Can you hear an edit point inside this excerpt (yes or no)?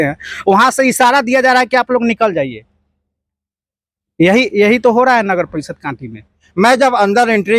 yes